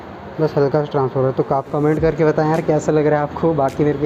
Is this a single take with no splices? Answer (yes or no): no